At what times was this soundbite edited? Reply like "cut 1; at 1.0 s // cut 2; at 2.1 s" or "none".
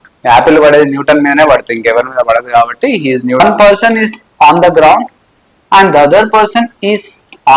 cut 1; at 3.4 s

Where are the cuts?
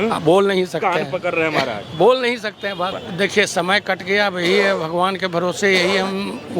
cut 1; at 3.0 s

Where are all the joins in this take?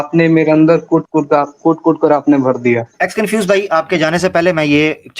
cut 1; at 2.9 s

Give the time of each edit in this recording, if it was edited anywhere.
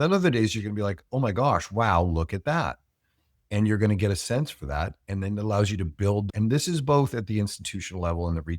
cut 1; at 6.3 s

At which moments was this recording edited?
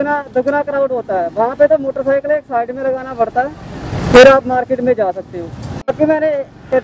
cut 1; at 5.9 s

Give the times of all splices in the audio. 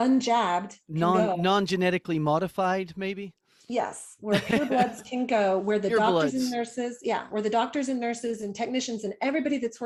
none

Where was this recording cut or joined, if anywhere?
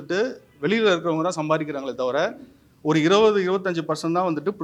none

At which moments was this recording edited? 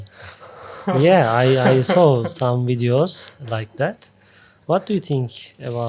none

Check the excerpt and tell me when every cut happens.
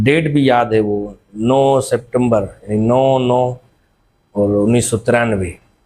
none

